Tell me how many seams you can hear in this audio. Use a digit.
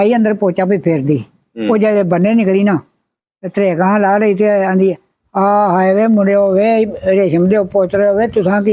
0